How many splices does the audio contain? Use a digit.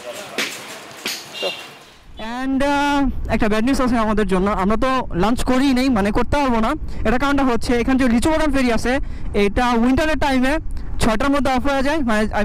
1